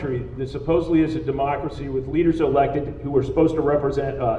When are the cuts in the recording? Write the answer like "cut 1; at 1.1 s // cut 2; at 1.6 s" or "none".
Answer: none